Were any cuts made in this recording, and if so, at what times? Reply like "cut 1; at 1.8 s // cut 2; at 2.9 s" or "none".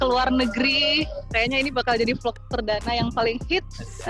cut 1; at 1.3 s